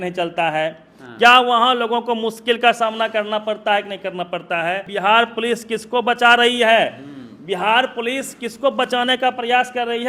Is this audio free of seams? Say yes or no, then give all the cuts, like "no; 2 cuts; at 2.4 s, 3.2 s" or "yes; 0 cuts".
no; 1 cut; at 4.9 s